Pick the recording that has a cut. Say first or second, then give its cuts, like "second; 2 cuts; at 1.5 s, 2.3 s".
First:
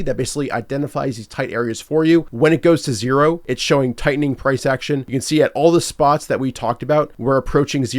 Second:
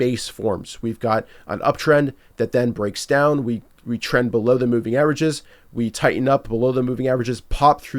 first; 4 cuts; at 2.3 s, 3.5 s, 5.1 s, 7.1 s